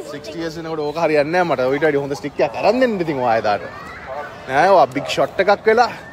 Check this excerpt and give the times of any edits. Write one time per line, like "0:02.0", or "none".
none